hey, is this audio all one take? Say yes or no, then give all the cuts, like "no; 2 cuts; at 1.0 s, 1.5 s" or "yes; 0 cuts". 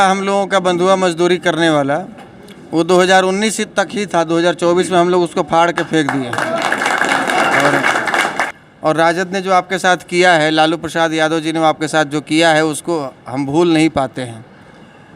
no; 1 cut; at 8.4 s